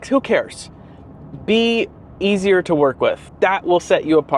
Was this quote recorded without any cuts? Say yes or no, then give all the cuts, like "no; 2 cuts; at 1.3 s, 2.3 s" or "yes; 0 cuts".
no; 1 cut; at 3.3 s